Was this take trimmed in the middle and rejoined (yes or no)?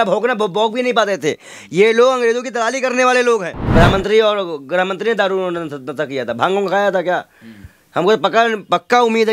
yes